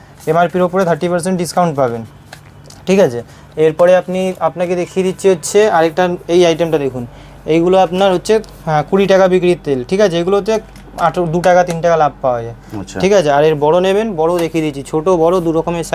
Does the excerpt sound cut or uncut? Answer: uncut